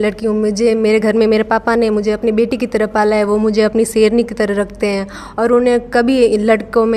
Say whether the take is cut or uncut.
uncut